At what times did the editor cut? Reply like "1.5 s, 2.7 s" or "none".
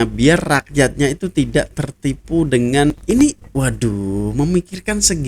2.9 s